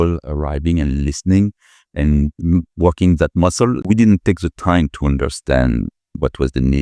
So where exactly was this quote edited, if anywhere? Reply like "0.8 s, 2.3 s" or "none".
3.8 s